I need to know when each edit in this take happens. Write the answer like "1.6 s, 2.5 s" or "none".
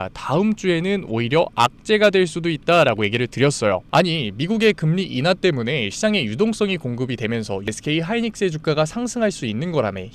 7.7 s